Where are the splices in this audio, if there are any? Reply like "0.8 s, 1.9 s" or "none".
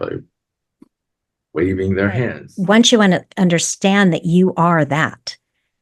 2.4 s